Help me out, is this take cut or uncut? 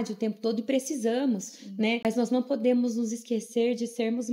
cut